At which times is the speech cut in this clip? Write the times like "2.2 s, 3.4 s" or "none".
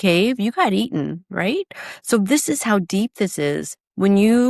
none